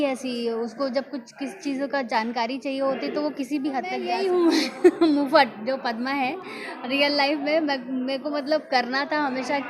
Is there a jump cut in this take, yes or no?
yes